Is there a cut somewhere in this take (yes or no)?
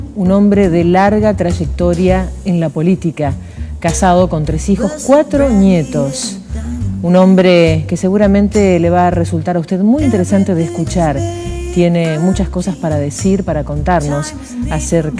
no